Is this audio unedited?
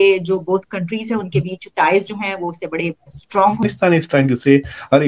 no; 1 cut; at 3.6 s

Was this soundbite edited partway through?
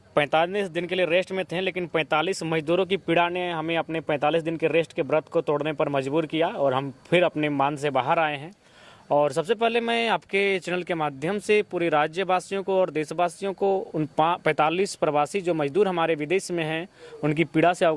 no; 0 cuts

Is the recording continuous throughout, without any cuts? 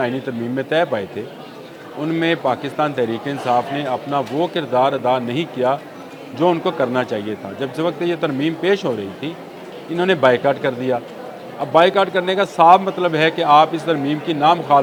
yes; 0 cuts

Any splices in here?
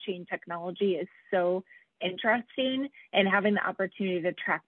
no; 0 cuts

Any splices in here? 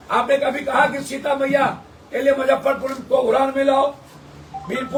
no; 0 cuts

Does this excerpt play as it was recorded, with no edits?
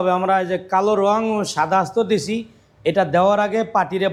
yes; 0 cuts

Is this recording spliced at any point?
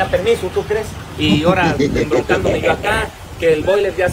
no; 0 cuts

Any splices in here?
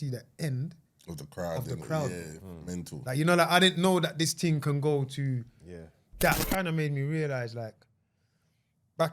yes; 2 cuts; at 2.9 s, 6.4 s

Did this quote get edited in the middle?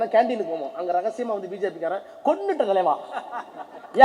no; 0 cuts

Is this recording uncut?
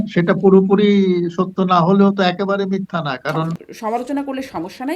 no; 1 cut; at 3.7 s

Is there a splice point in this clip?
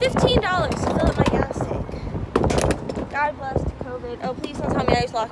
no; 0 cuts

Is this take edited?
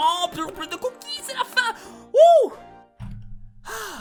no; 0 cuts

